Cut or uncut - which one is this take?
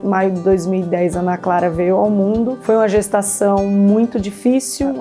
cut